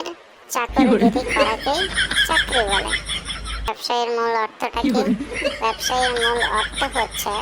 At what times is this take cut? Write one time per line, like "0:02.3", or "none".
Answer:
0:03.8